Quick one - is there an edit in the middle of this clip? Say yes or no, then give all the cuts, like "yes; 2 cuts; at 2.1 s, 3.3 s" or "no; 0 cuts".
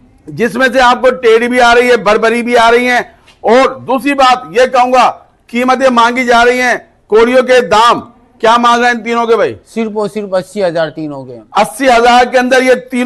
no; 0 cuts